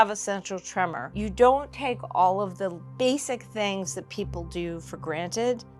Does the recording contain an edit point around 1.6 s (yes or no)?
no